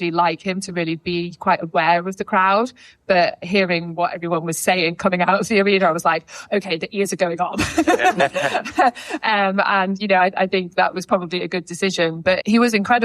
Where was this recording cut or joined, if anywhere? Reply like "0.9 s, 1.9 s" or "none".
3.4 s